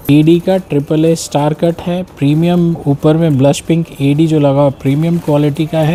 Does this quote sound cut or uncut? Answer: uncut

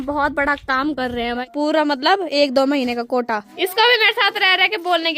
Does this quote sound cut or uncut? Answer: cut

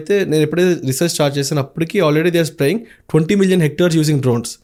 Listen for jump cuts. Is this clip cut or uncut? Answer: uncut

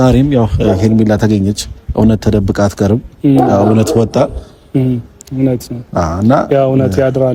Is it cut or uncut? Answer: uncut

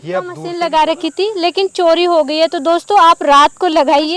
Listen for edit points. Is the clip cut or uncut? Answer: uncut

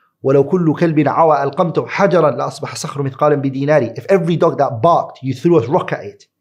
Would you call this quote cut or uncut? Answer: uncut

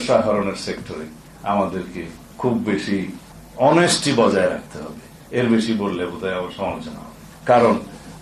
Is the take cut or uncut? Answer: uncut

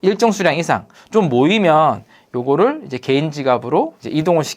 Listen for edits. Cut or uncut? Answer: cut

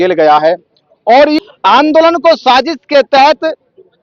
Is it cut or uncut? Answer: cut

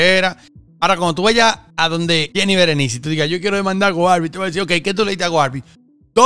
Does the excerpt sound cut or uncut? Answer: cut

